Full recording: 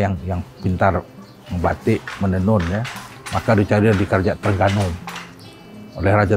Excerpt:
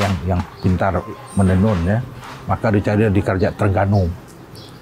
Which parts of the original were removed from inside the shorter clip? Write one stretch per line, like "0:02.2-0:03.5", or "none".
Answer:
0:01.2-0:02.1

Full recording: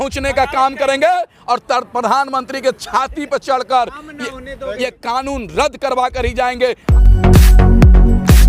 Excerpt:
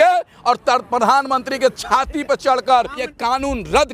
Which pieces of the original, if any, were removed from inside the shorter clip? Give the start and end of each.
0:04.1-0:04.9

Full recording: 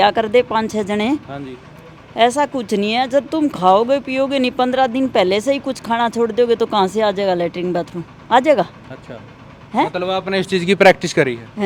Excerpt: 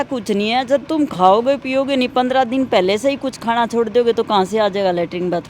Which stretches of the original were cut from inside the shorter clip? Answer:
none

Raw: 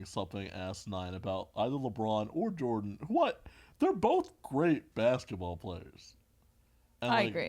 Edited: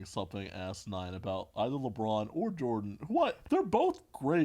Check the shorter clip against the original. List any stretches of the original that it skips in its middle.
0:03.4-0:03.7

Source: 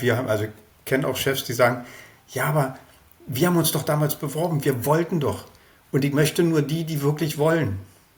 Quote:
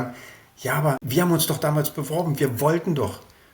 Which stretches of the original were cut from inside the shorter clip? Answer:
0:02.7-0:03.3

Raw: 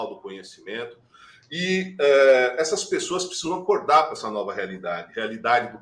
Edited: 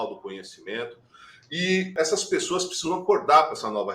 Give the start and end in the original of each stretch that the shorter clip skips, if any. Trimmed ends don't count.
0:01.9-0:02.5

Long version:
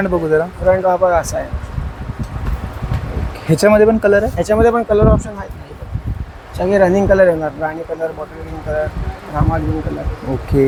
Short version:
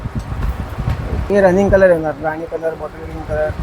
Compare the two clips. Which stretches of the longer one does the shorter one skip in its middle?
0:03.3-0:06.7

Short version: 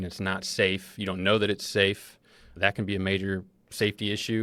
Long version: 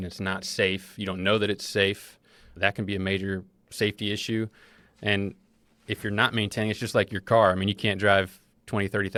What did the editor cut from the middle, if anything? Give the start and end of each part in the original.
none

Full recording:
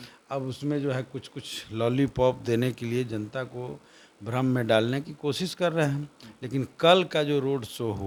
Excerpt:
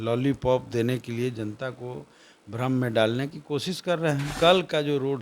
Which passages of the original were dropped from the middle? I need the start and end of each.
0:06.0-0:06.7

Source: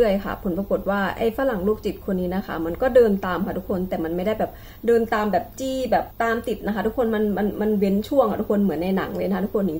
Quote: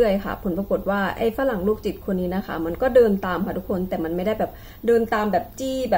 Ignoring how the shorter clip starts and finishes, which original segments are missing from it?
none

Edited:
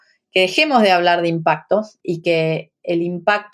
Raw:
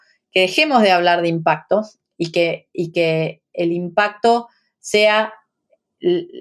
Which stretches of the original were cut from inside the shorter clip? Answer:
0:02.0-0:02.7

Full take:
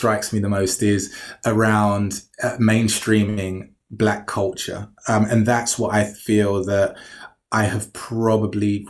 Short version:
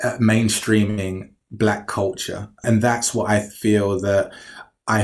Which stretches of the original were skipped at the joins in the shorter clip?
0:05.0-0:05.3

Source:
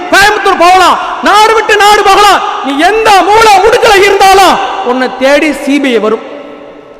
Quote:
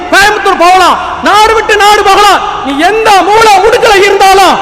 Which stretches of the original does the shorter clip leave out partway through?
none

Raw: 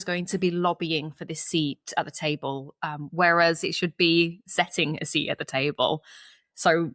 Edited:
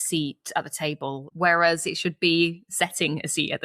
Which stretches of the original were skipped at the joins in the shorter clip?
0:02.7-0:03.0

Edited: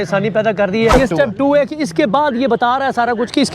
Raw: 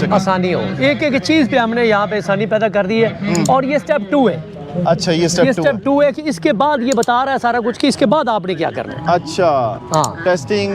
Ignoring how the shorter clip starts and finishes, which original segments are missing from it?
0:03.1-0:05.4

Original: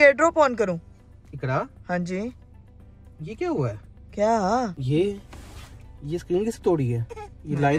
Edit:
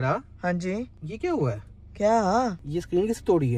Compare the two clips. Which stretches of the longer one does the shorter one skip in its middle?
0:02.5-0:03.2
0:04.8-0:06.0

